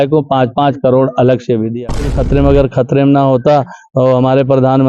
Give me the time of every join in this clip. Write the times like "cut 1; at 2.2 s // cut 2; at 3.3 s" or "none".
cut 1; at 2.0 s

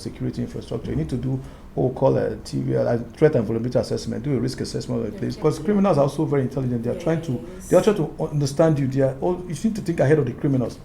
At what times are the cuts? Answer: cut 1; at 5.4 s

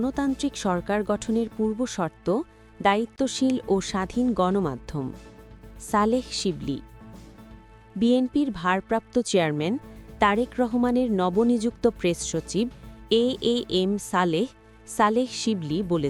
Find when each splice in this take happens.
none

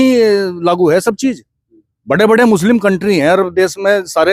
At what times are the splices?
none

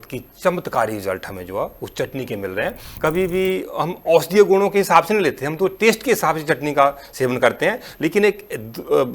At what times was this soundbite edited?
cut 1; at 2.9 s

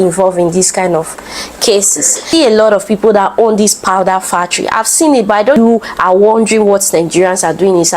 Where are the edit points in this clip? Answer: cut 1; at 2.2 s // cut 2; at 5.5 s

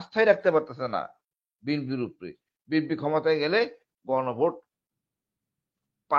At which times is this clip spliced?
none

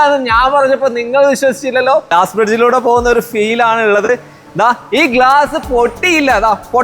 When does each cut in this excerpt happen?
cut 1; at 2.1 s

